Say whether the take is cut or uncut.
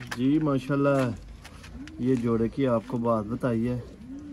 uncut